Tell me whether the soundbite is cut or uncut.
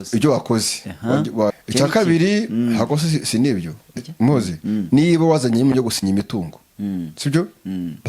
cut